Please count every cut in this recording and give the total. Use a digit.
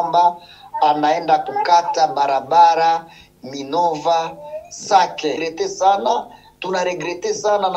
1